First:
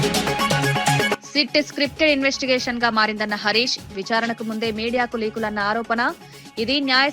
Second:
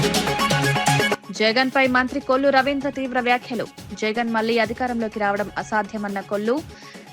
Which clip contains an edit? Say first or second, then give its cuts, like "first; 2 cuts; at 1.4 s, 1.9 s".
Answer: first; 1 cut; at 1.2 s